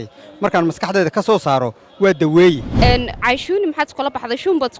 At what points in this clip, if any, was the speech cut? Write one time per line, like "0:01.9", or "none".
0:02.7